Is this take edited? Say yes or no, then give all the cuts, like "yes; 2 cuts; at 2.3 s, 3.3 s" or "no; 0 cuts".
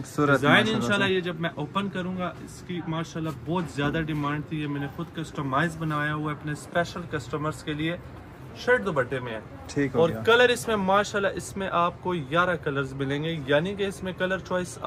no; 0 cuts